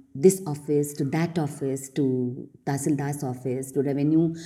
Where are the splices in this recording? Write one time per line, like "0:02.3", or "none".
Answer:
none